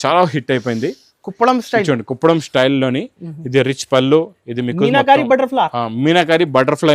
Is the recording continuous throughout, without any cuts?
yes; 0 cuts

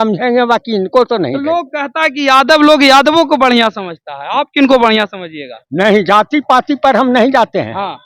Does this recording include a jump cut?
no; 0 cuts

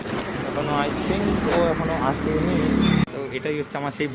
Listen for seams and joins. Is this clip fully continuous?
no; 1 cut; at 3.0 s

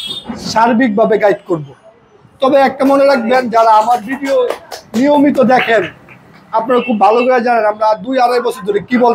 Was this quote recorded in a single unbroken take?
yes; 0 cuts

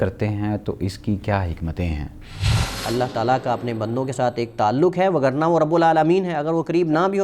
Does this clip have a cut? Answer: yes; 1 cut; at 2.5 s

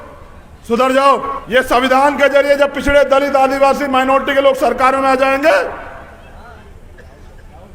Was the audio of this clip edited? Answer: yes; 1 cut; at 1.4 s

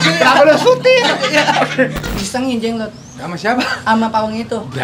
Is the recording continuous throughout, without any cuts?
no; 1 cut; at 2.1 s

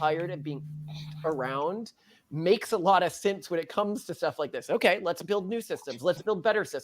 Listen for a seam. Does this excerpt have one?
no; 0 cuts

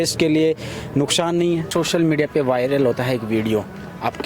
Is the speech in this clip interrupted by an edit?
yes; 1 cut; at 1.7 s

